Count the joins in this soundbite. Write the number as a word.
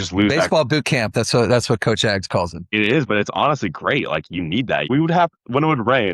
two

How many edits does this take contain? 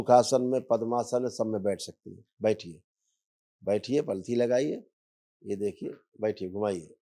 zero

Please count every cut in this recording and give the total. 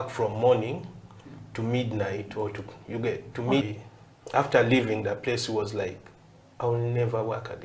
one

